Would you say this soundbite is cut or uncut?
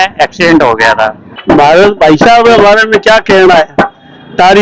cut